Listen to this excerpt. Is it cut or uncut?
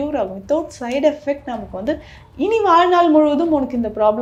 uncut